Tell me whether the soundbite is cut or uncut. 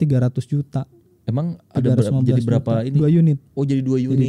uncut